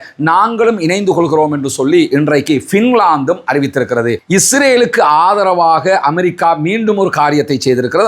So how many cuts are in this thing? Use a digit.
1